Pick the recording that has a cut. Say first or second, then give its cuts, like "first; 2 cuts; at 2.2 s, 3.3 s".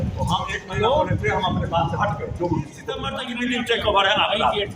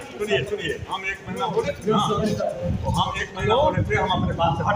first; 1 cut; at 3.2 s